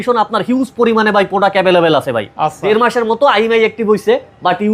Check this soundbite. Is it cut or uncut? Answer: cut